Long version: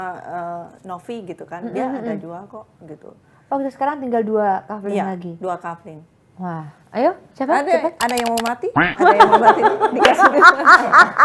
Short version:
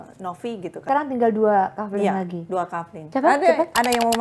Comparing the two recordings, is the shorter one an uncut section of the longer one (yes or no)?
no